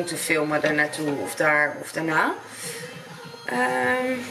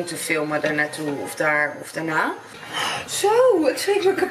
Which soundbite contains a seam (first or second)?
second